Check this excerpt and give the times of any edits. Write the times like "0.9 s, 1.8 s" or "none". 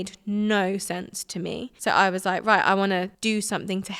1.7 s, 3.1 s

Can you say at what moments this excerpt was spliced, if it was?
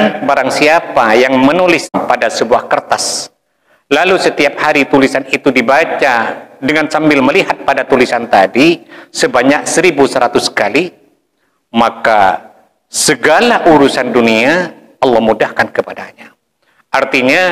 1.9 s

